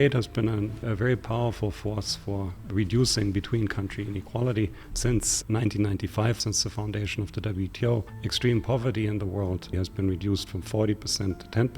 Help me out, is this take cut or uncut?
cut